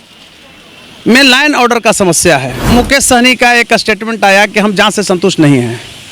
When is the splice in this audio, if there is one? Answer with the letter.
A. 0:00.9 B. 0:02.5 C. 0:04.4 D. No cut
B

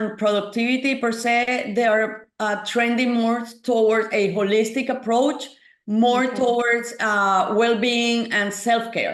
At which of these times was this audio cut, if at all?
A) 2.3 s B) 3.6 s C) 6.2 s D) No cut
D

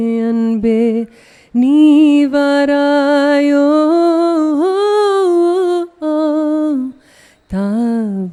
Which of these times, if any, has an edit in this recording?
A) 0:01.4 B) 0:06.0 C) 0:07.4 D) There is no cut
D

